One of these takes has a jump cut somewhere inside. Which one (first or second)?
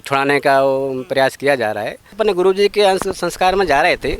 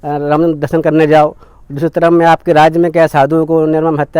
first